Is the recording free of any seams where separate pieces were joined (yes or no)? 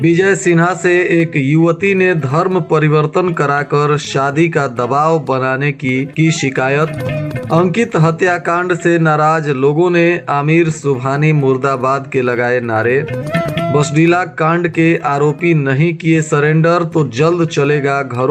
yes